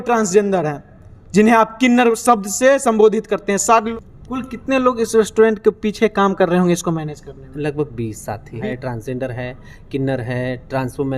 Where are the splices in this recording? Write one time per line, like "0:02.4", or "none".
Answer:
0:03.9
0:08.6

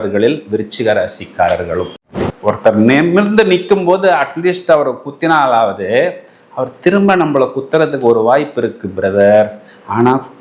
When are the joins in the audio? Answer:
0:02.1

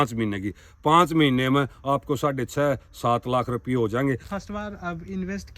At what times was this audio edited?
0:04.3

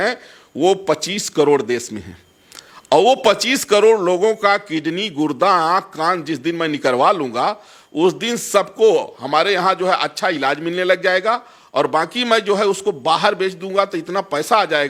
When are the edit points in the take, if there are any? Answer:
none

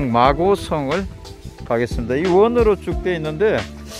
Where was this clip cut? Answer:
none

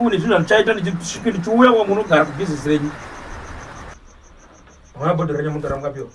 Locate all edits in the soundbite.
0:03.9

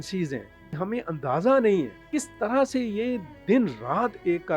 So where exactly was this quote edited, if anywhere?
0:00.8
0:02.0

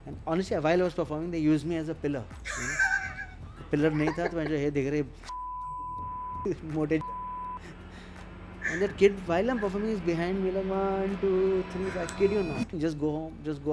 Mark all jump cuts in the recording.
0:12.8

